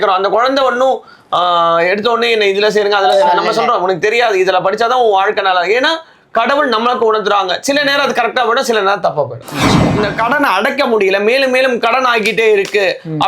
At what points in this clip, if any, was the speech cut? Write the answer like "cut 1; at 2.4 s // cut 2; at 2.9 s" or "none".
cut 1; at 9.9 s